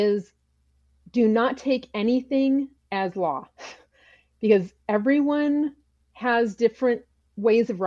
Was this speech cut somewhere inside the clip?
no; 0 cuts

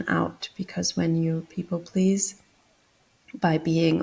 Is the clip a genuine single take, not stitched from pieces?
yes; 0 cuts

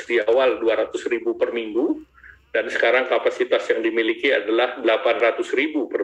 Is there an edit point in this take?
no; 0 cuts

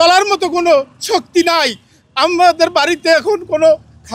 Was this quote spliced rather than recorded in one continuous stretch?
no; 0 cuts

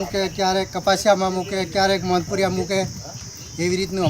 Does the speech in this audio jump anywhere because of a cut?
no; 0 cuts

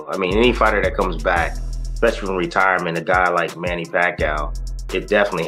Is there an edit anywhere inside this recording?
no; 0 cuts

